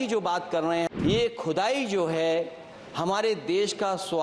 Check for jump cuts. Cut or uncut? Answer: cut